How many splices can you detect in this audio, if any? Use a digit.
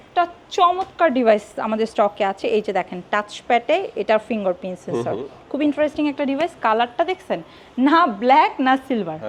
0